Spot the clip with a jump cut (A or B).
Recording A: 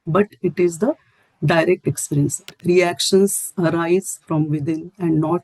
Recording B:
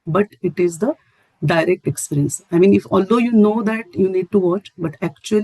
A